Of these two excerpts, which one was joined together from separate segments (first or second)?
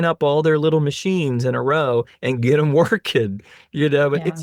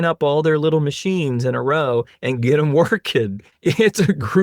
second